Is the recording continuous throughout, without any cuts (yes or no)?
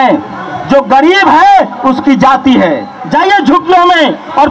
no